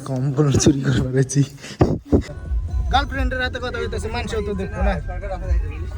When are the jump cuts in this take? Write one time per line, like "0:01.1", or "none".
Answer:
0:02.3